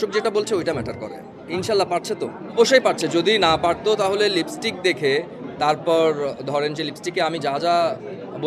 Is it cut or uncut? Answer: cut